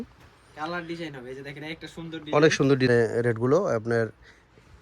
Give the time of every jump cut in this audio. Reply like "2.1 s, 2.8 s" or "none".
2.9 s